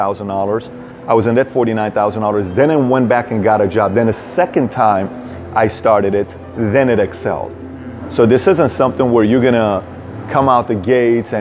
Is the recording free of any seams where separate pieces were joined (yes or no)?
yes